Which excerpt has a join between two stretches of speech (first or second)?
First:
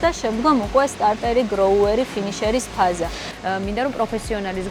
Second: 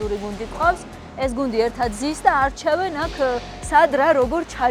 first